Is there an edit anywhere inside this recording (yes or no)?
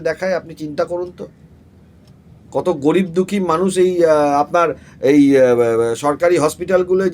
no